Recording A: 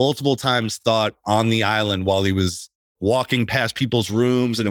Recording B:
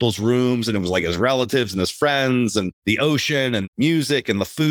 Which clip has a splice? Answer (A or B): B